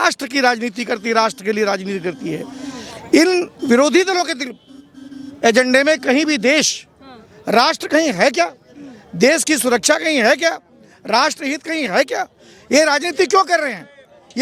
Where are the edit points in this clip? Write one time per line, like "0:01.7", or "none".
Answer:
none